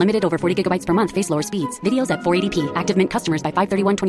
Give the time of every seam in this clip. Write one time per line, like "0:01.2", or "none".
none

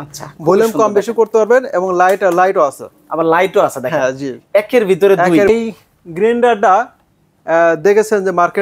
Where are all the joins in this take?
0:05.5

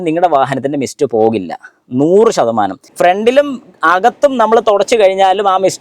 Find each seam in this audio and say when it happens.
0:02.8

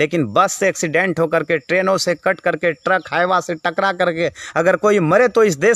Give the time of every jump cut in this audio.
none

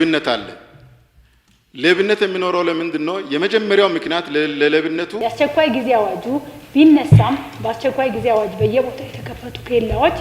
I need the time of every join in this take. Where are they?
0:05.1

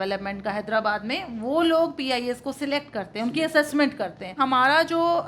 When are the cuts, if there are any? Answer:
0:04.4

